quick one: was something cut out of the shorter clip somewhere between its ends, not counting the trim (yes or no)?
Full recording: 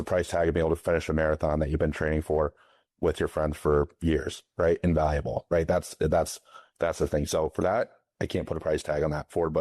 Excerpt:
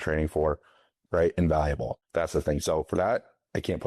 yes